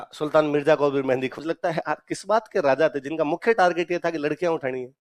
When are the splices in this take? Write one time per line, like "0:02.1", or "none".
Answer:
0:01.3